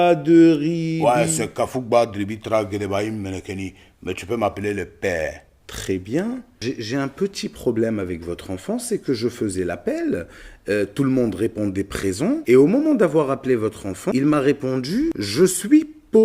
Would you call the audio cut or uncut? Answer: cut